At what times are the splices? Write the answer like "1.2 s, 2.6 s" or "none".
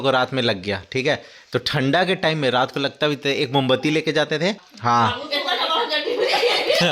4.6 s